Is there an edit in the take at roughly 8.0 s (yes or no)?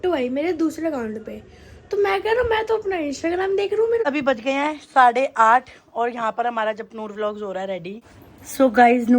yes